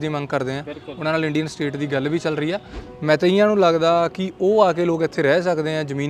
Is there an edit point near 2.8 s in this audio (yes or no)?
yes